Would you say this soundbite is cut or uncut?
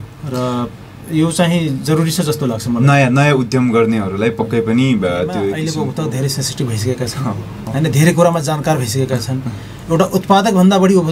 cut